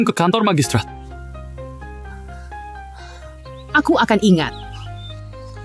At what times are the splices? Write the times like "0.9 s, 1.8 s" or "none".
4.5 s